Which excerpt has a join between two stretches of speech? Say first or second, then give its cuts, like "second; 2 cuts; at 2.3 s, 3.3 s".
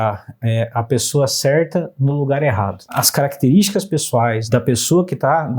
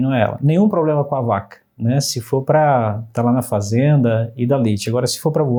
first; 2 cuts; at 3.0 s, 4.4 s